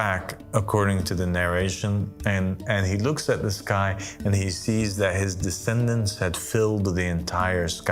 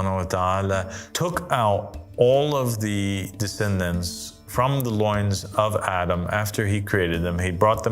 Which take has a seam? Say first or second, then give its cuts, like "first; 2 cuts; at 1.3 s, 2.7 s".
second; 1 cut; at 1.0 s